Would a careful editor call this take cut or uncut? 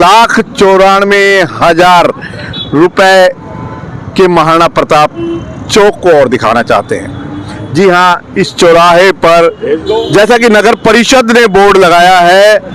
uncut